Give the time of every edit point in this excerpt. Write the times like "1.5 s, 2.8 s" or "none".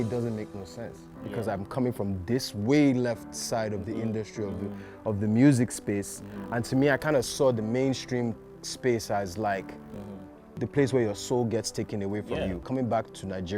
12.6 s